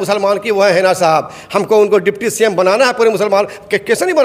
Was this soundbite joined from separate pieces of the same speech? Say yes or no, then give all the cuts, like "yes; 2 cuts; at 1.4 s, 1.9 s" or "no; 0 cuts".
no; 0 cuts